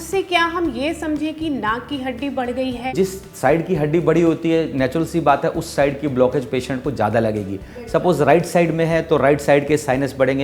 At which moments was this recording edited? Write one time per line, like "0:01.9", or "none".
0:02.9